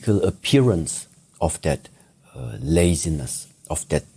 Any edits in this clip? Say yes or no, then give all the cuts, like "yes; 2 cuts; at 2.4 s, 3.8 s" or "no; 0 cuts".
no; 0 cuts